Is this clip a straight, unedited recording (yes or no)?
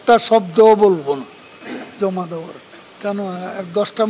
no